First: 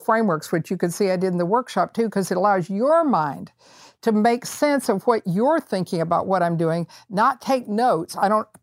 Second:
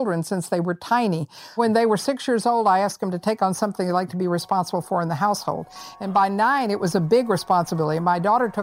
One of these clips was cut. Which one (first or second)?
second